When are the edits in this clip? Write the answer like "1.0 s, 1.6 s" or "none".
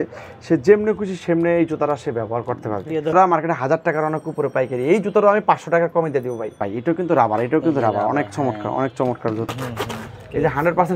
3.1 s, 6.6 s, 9.5 s